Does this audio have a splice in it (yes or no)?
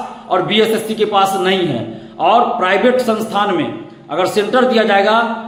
no